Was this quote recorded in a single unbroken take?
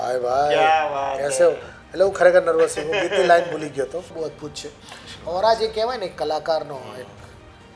no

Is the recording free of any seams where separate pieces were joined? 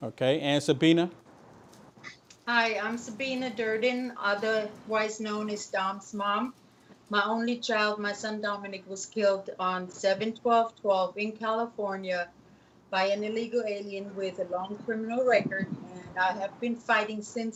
yes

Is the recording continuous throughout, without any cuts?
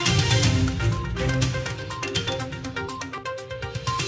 no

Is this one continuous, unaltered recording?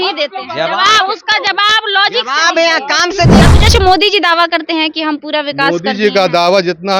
no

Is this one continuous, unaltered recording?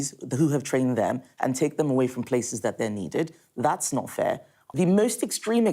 no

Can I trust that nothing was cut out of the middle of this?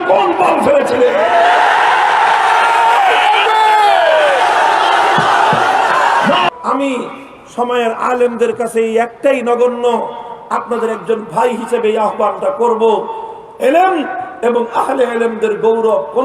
no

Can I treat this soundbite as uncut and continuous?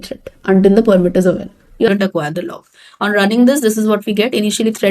no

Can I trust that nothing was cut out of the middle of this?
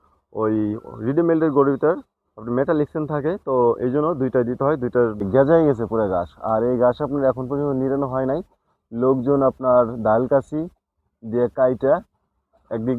no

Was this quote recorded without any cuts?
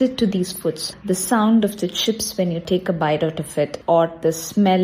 no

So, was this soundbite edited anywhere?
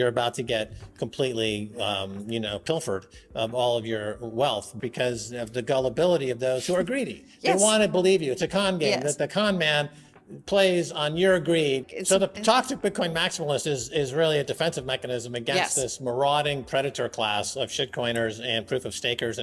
yes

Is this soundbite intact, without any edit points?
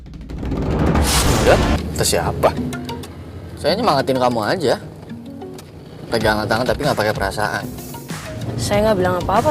no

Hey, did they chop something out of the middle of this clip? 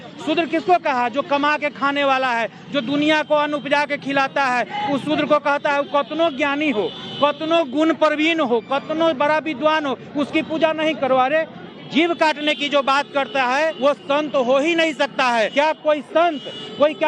yes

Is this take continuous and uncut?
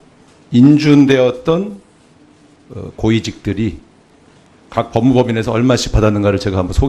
no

